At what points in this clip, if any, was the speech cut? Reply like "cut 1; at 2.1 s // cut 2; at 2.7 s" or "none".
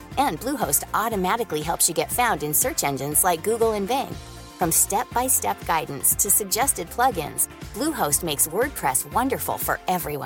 none